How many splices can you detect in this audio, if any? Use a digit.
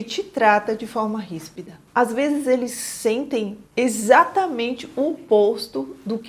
1